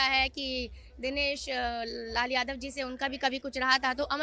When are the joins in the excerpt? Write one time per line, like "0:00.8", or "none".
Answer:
none